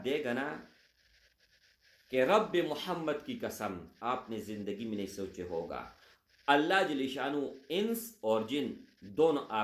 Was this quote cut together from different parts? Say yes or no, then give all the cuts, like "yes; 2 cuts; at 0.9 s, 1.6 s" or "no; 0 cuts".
no; 0 cuts